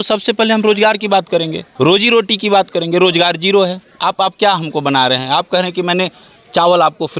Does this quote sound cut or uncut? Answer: cut